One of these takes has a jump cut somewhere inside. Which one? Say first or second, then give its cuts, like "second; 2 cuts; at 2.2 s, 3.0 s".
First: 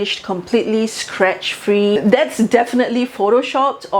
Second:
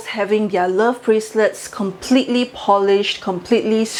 first; 1 cut; at 2.0 s